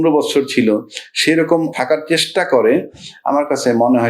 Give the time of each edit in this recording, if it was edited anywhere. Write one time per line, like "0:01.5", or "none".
0:01.7

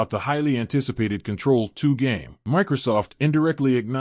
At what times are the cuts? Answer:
0:02.3

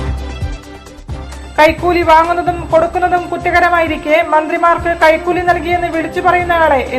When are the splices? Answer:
none

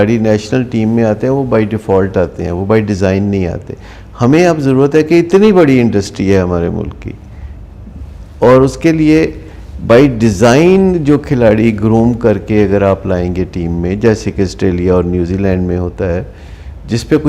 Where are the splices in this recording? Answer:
none

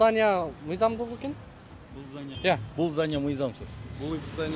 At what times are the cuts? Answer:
0:02.3

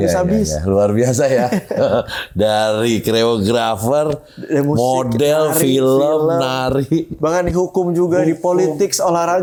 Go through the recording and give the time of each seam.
none

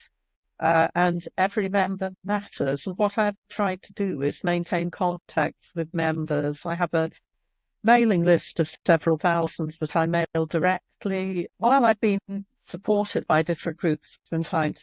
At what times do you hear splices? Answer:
0:11.4

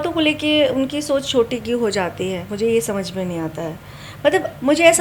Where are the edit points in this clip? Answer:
none

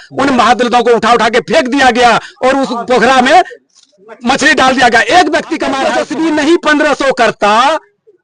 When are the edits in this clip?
0:05.9

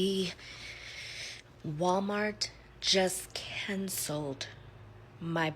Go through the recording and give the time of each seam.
none

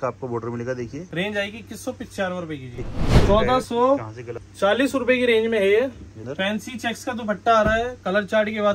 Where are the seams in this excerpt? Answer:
0:01.0
0:03.2

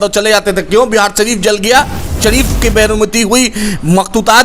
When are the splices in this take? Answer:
0:02.2

